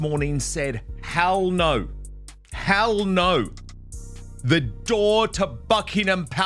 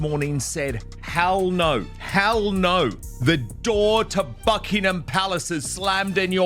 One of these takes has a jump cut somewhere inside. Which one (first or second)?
second